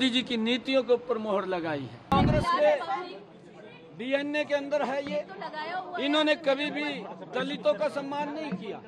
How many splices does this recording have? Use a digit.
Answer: 1